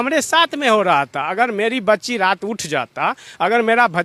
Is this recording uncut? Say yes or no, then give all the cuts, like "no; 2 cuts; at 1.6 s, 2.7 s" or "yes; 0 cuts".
yes; 0 cuts